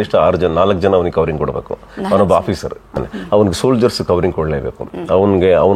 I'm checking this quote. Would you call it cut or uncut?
cut